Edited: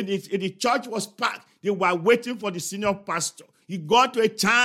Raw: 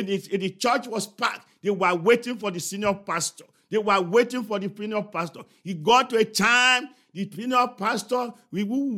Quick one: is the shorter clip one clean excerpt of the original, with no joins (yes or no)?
no